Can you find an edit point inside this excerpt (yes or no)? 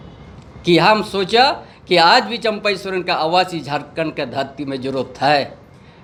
no